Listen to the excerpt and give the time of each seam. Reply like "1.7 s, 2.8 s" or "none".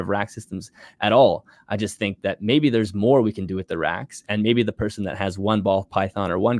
none